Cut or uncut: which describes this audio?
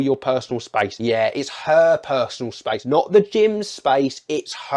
uncut